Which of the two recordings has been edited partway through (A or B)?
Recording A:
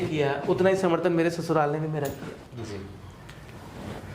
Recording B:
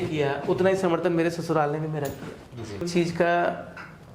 B